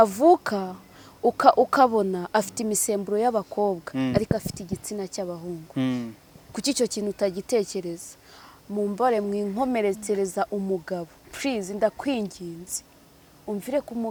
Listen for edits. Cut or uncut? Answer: uncut